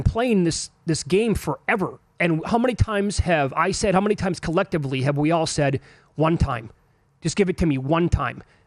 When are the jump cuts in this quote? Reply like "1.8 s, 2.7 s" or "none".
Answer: none